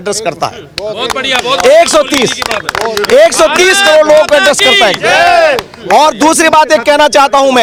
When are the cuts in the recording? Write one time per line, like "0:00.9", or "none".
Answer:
none